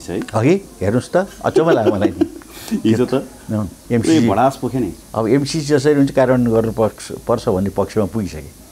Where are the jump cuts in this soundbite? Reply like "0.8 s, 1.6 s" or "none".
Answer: 3.8 s, 5.0 s